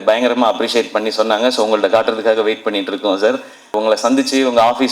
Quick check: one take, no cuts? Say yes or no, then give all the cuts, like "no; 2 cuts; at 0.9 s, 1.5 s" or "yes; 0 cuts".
no; 1 cut; at 3.7 s